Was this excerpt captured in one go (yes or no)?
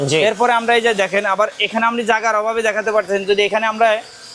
yes